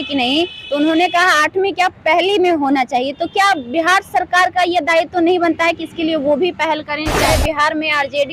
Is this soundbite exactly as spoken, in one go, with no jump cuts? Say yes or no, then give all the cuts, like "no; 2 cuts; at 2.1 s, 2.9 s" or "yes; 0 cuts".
no; 1 cut; at 7.2 s